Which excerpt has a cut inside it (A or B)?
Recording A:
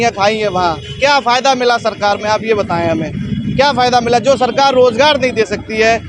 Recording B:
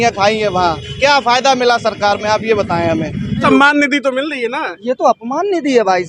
B